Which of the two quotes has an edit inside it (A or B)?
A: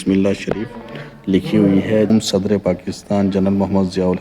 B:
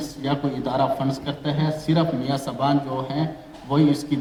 A